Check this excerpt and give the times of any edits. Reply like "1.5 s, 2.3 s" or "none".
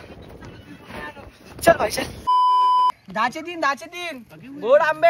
2.3 s